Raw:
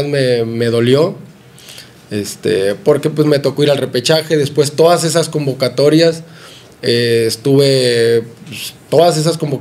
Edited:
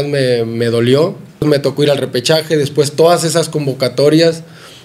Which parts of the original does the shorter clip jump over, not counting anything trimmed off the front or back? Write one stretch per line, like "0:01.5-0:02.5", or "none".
0:01.4-0:03.2